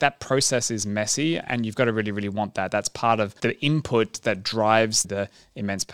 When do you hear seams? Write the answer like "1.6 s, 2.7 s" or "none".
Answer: 1.4 s, 3.3 s, 5.0 s